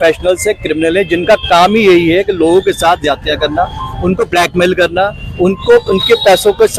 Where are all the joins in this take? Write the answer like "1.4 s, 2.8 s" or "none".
none